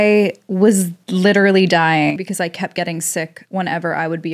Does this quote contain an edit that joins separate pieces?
yes; 1 cut; at 2.2 s

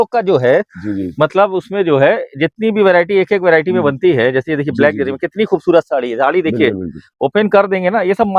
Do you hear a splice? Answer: no; 0 cuts

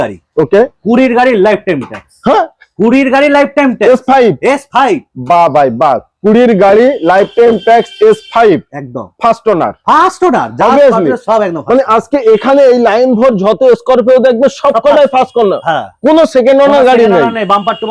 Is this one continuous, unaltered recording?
yes; 0 cuts

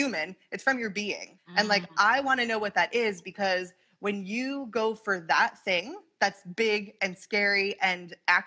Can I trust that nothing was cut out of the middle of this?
no; 1 cut; at 1.3 s

